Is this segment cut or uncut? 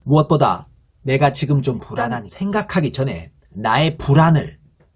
cut